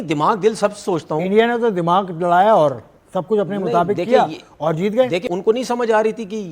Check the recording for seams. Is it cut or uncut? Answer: cut